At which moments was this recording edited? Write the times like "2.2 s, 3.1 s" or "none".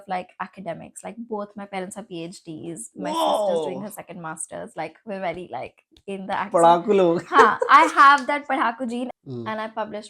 9.1 s